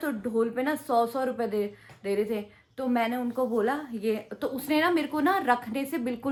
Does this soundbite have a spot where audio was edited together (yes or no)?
no